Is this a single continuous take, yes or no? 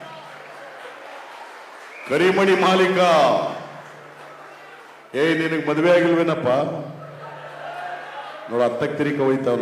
yes